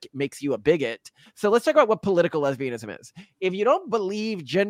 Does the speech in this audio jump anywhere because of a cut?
yes; 1 cut; at 1.2 s

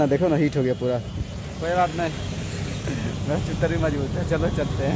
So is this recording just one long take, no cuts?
yes; 0 cuts

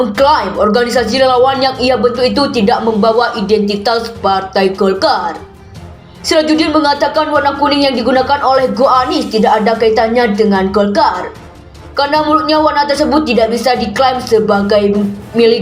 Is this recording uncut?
yes; 0 cuts

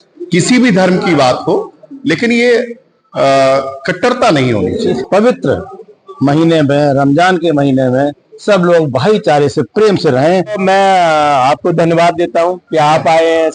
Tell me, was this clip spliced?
yes; 2 cuts; at 4.9 s, 10.6 s

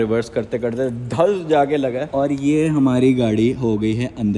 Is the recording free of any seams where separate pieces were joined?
yes; 0 cuts

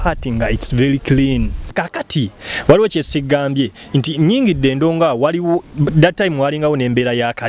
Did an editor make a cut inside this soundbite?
yes; 1 cut; at 1.8 s

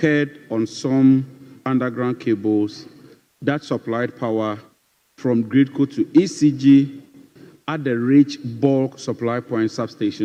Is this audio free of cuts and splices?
yes; 0 cuts

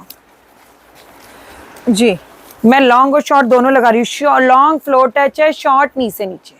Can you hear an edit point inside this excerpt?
no; 0 cuts

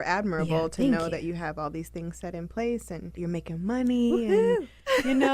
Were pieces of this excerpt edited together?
yes; 1 cut; at 3.0 s

